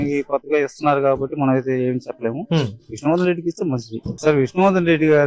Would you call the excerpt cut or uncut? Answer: cut